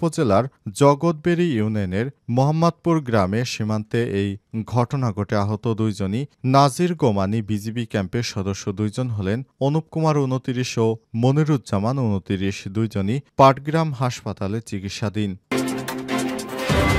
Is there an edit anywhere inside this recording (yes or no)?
yes